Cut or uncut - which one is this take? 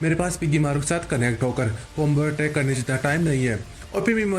uncut